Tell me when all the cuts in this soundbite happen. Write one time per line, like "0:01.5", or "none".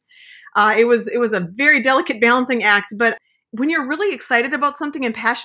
0:03.2